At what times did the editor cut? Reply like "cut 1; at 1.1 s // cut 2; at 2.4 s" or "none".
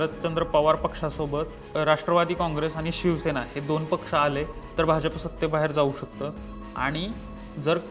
cut 1; at 1.6 s